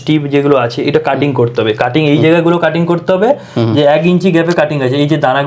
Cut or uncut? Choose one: uncut